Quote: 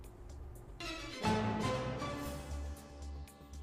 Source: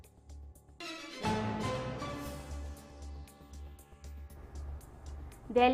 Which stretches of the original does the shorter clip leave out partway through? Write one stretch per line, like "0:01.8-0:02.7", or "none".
none